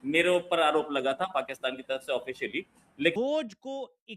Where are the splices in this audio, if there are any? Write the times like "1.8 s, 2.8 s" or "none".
3.1 s